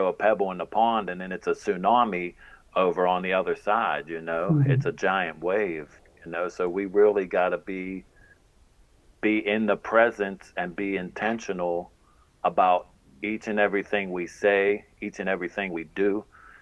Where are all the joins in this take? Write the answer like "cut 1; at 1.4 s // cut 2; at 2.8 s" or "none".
none